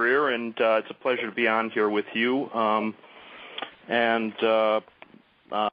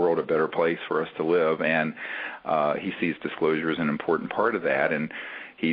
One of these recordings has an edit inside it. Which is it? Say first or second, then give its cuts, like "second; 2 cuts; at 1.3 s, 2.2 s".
first; 1 cut; at 2.5 s